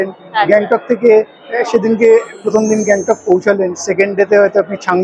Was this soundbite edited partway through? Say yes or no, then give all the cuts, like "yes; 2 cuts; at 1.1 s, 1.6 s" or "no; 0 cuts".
no; 0 cuts